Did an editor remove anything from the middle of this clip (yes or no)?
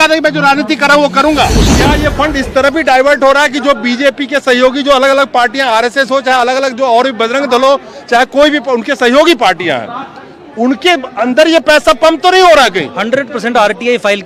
yes